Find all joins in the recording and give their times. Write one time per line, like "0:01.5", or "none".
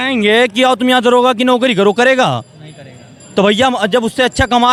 none